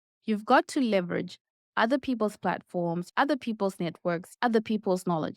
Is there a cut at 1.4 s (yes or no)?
no